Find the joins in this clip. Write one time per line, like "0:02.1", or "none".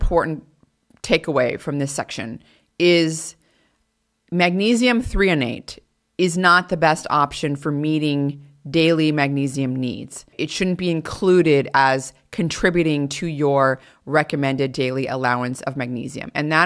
0:10.2

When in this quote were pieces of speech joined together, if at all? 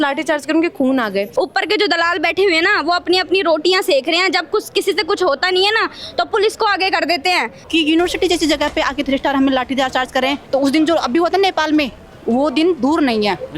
0:01.3
0:07.6
0:10.4

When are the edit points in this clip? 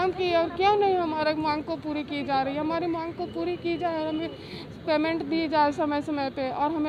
none

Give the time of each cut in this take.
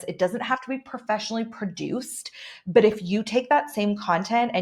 none

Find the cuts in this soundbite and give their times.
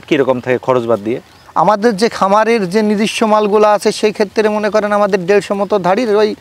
0:01.4

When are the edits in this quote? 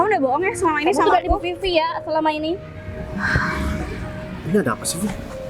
none

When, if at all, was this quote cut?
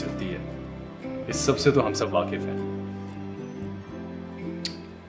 none

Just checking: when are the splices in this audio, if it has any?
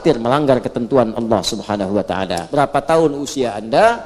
0:02.4

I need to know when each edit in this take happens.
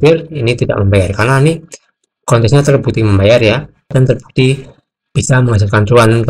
0:03.9

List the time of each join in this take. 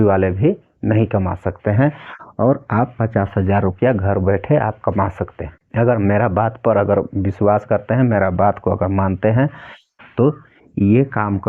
none

